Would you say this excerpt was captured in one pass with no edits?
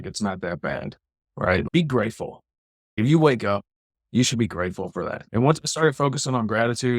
no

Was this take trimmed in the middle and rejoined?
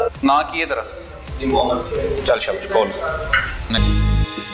no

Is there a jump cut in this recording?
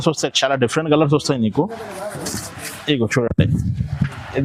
no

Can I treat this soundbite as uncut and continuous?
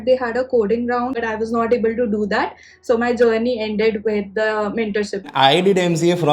no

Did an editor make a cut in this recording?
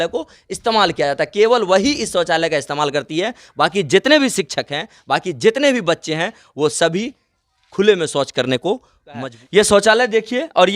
yes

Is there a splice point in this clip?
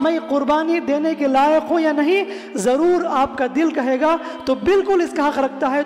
no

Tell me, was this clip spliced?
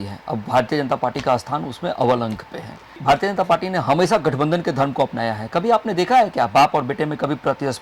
yes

